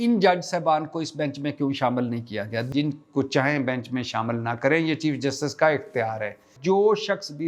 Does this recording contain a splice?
yes; 2 cuts; at 2.7 s, 6.5 s

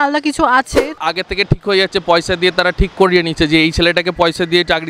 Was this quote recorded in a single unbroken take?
no; 1 cut; at 1.0 s

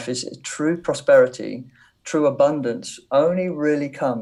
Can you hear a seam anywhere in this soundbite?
no; 0 cuts

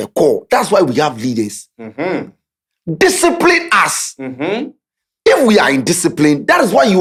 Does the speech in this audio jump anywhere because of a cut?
no; 0 cuts

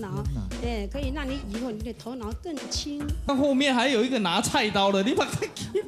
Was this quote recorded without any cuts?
no; 1 cut; at 3.3 s

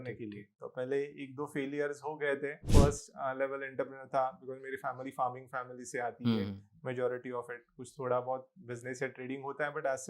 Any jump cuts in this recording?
yes; 1 cut; at 2.6 s

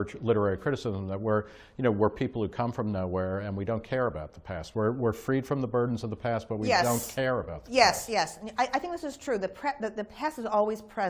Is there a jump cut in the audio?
no; 0 cuts

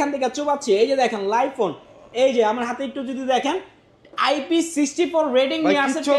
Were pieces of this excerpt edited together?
no; 0 cuts

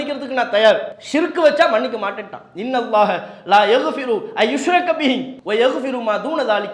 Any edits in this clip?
yes; 2 cuts; at 1.0 s, 5.3 s

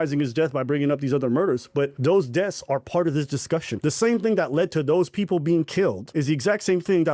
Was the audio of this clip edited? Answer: yes; 3 cuts; at 1.9 s, 3.7 s, 6.0 s

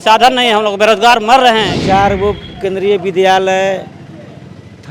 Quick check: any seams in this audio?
yes; 1 cut; at 1.7 s

